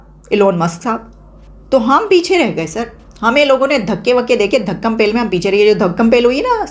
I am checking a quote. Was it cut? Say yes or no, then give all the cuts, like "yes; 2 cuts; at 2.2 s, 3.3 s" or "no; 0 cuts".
no; 0 cuts